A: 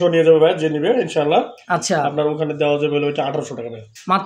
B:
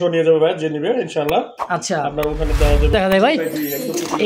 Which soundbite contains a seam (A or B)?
B